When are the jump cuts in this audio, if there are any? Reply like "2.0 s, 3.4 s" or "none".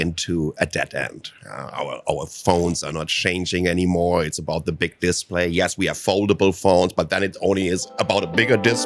none